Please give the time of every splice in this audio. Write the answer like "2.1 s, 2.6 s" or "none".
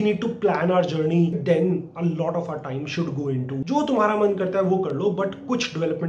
1.4 s, 3.5 s

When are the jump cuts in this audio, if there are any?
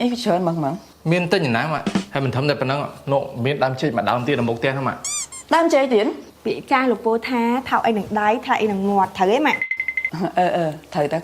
0.9 s, 2.1 s, 6.3 s

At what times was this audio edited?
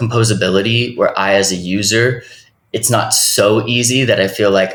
none

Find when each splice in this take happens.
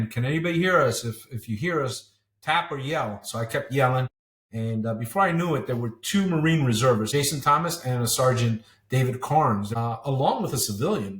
7.1 s, 9.7 s

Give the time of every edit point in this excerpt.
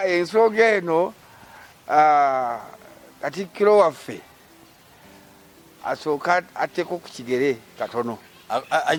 none

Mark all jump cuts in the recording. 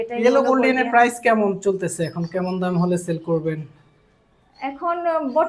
none

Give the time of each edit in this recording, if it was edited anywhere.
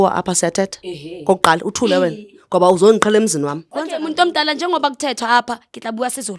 3.7 s

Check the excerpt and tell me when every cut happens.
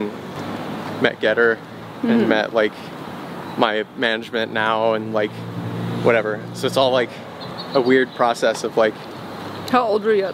none

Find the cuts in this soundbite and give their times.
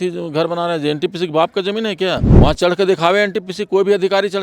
2.3 s

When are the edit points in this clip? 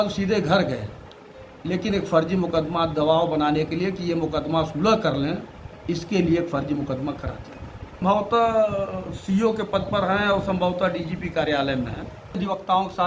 8.0 s, 12.4 s

